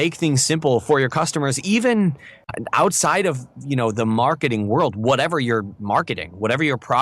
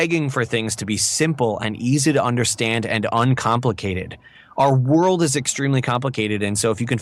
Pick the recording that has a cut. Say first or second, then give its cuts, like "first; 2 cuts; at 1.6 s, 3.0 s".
first; 1 cut; at 2.5 s